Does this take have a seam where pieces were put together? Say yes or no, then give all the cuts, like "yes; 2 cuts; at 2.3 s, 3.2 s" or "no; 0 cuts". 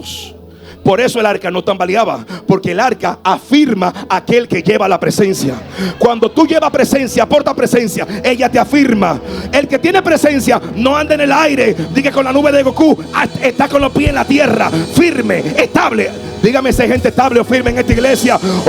no; 0 cuts